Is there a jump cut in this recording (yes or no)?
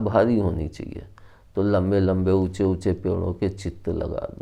no